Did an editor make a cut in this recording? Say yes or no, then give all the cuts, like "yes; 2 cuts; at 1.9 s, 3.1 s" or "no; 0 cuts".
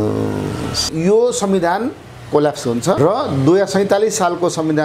yes; 2 cuts; at 0.9 s, 3.0 s